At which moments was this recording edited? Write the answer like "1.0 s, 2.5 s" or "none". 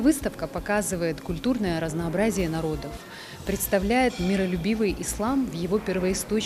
none